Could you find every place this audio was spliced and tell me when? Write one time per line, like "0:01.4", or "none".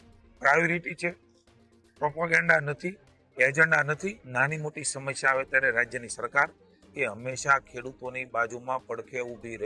0:04.2

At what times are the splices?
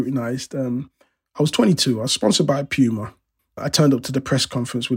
none

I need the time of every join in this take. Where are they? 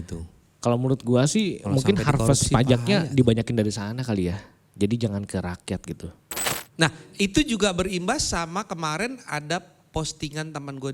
0:06.3

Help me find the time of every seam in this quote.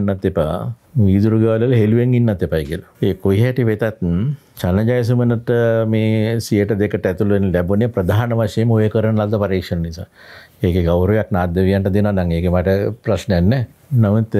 none

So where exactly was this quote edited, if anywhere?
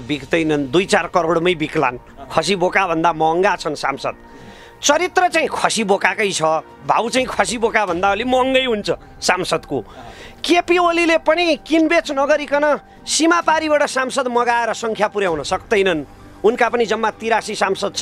none

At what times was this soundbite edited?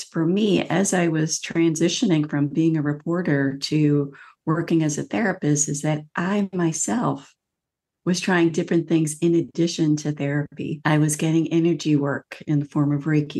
0:10.8

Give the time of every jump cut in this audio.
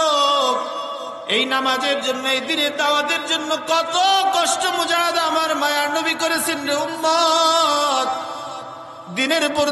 0:01.2

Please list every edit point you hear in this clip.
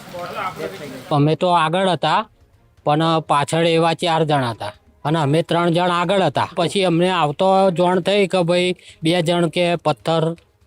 0:00.9
0:06.5

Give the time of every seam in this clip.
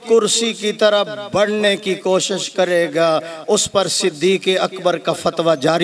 none

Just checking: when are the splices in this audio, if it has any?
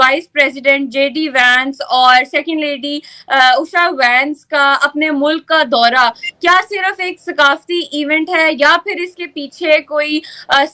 none

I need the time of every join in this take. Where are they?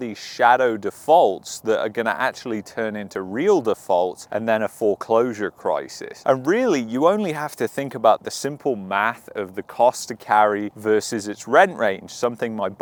none

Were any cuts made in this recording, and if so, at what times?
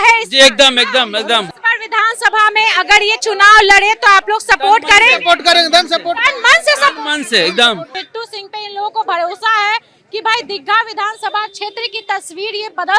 0:01.5
0:07.9

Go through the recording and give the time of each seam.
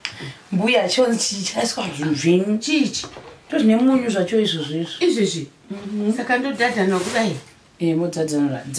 none

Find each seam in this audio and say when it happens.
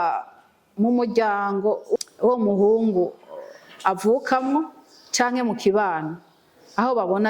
0:02.0

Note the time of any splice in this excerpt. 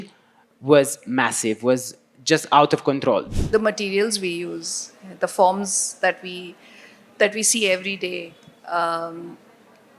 0:03.3

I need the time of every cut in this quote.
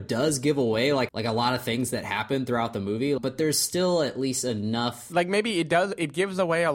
0:01.1
0:03.2
0:05.0

